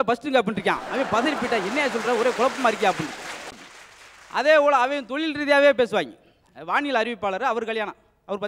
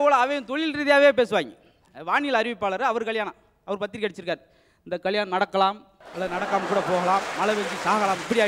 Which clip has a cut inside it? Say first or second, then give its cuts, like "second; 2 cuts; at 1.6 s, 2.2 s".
first; 1 cut; at 3.5 s